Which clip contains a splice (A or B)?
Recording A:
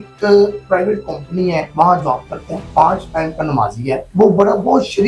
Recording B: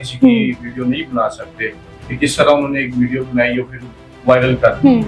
A